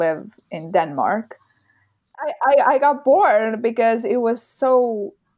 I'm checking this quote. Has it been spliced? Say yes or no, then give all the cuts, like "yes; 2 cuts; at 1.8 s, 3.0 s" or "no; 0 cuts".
yes; 1 cut; at 2.2 s